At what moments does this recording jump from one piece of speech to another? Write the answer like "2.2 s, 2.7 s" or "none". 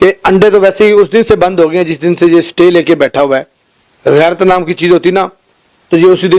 none